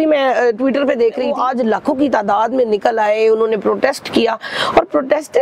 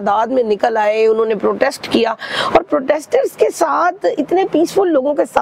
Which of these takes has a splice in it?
first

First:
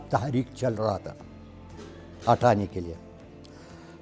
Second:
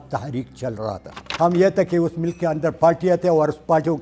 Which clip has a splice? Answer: second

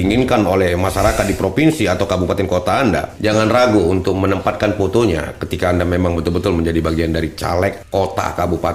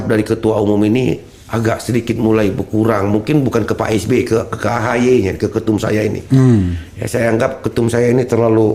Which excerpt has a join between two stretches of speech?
first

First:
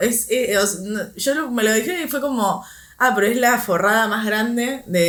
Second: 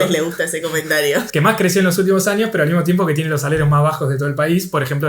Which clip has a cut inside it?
second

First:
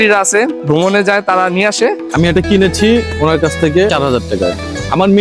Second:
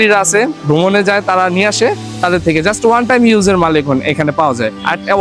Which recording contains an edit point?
first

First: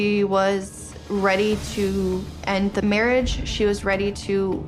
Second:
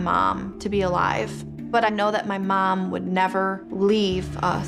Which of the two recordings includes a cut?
second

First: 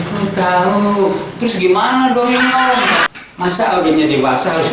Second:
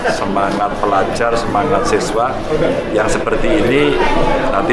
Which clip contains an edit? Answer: first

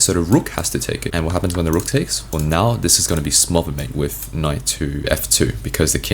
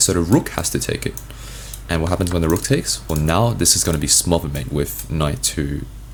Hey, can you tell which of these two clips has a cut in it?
first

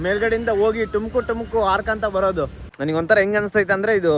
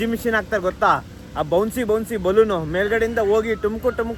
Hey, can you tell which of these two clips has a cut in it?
first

